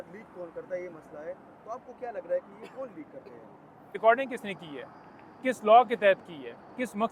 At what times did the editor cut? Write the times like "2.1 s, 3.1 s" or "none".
4.0 s